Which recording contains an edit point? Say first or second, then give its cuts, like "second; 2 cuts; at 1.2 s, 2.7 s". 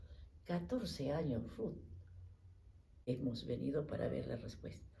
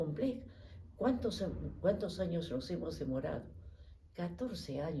first; 1 cut; at 2.5 s